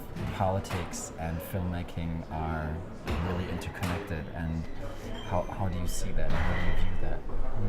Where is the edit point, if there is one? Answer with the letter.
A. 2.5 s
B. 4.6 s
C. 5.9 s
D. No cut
A